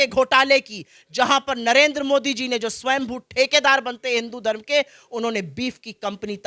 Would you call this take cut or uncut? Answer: uncut